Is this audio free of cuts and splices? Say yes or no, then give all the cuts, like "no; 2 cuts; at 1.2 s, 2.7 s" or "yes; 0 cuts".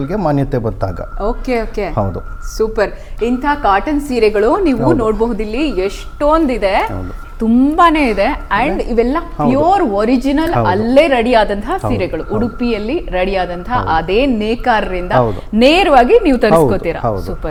yes; 0 cuts